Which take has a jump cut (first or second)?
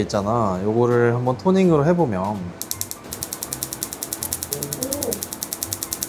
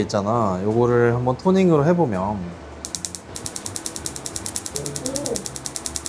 first